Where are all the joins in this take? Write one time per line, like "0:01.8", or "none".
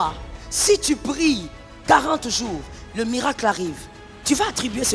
none